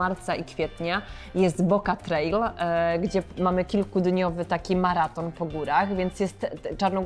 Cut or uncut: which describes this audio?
uncut